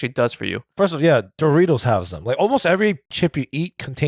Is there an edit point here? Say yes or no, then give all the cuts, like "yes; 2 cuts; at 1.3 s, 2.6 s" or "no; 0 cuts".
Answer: yes; 1 cut; at 3.1 s